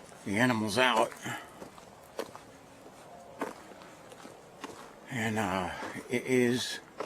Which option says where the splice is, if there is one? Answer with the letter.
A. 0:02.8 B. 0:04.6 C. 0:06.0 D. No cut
C